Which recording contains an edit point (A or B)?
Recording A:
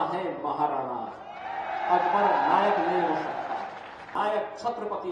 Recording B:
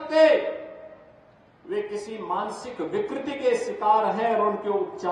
A